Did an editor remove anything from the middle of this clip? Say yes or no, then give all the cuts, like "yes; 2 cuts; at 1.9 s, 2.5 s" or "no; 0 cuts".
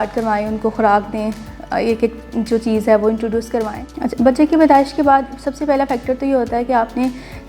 yes; 1 cut; at 3.8 s